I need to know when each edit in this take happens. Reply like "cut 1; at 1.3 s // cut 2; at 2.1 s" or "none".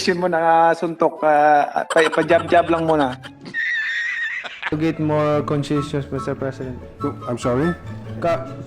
cut 1; at 3.3 s // cut 2; at 4.7 s